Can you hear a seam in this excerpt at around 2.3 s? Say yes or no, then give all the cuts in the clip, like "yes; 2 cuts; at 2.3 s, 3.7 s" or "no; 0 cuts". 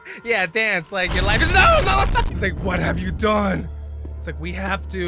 yes; 1 cut; at 2.3 s